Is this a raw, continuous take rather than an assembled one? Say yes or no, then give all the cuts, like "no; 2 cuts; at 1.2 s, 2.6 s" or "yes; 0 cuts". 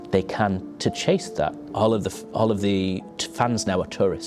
no; 1 cut; at 1.6 s